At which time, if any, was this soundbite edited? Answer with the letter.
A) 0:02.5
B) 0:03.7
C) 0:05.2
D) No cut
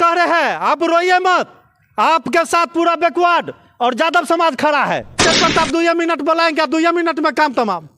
C